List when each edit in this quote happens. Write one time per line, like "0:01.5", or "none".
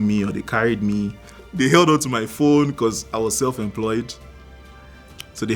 0:01.5